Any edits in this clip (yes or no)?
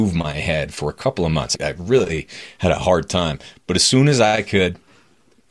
yes